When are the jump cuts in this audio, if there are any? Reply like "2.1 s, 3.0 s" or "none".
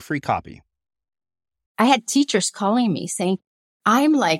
1.7 s